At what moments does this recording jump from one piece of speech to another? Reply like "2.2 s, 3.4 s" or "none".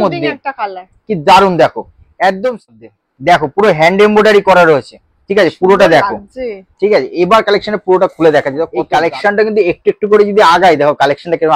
2.7 s, 8.7 s